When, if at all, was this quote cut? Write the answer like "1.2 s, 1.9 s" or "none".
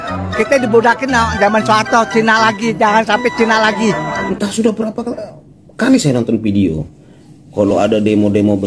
4.2 s